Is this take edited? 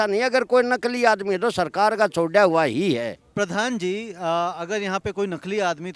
no; 0 cuts

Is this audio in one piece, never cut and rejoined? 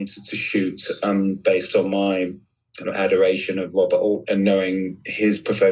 yes; 0 cuts

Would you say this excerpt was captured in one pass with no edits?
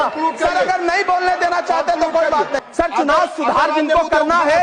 no; 1 cut; at 2.7 s

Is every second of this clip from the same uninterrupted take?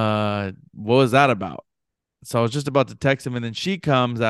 yes; 0 cuts

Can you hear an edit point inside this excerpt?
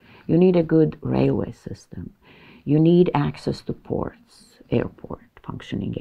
no; 0 cuts

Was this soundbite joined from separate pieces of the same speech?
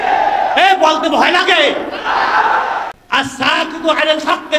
yes; 1 cut; at 2.8 s

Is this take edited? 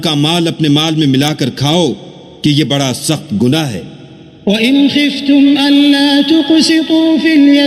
no; 0 cuts

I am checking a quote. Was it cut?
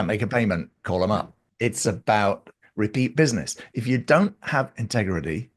yes; 1 cut; at 1.4 s

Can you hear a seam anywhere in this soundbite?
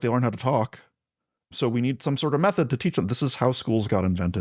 yes; 1 cut; at 1.5 s

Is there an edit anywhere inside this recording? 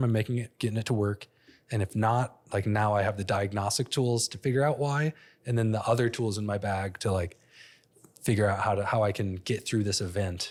no; 0 cuts

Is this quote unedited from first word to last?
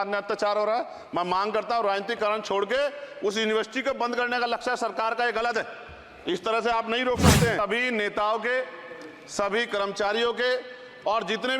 no; 1 cut; at 7.6 s

